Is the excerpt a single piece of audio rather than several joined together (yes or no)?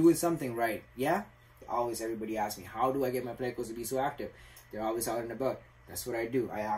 no